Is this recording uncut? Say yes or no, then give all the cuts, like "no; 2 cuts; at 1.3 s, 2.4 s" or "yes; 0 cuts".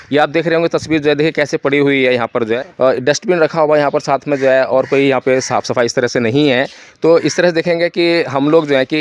no; 1 cut; at 2.6 s